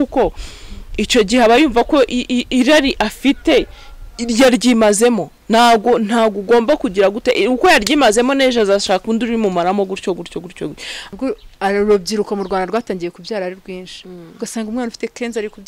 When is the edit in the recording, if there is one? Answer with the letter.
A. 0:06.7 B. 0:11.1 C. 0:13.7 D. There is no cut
B